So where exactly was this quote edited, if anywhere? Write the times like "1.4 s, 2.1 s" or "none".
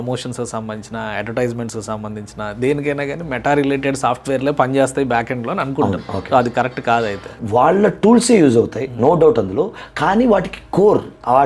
7.3 s

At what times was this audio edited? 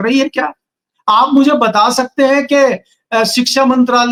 none

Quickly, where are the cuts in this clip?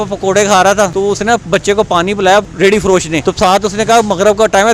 0.9 s, 2.7 s

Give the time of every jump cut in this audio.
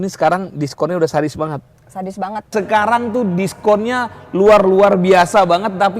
2.5 s

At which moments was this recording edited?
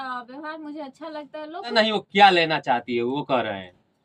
1.7 s

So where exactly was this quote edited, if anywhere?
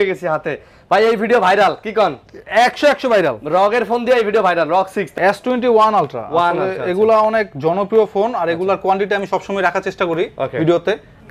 5.1 s

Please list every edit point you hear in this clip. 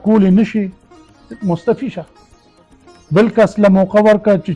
none

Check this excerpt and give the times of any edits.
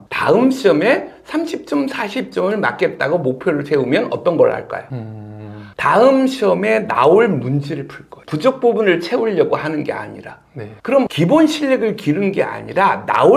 none

